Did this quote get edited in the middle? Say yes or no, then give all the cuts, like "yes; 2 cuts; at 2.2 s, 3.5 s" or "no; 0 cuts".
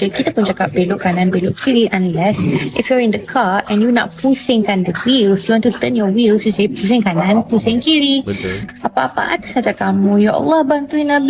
no; 0 cuts